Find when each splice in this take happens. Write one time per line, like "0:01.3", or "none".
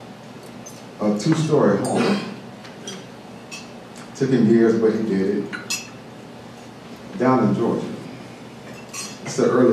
none

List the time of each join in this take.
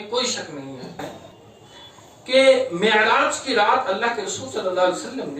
0:01.0

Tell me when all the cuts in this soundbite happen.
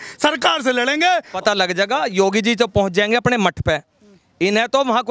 0:01.3

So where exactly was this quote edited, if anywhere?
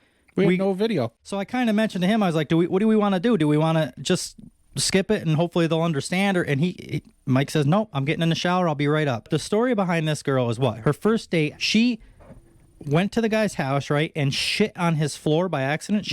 0:01.1
0:09.3
0:10.8
0:11.6

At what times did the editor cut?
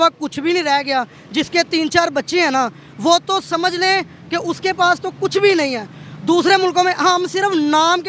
none

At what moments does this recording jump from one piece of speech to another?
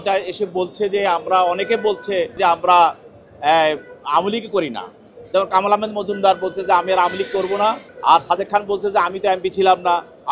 0:02.3
0:07.9

